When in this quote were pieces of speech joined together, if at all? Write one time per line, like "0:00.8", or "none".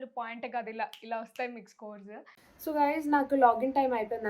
0:02.4